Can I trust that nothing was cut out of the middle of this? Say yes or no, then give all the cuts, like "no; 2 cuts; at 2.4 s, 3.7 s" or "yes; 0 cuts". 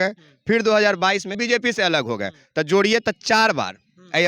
no; 1 cut; at 1.4 s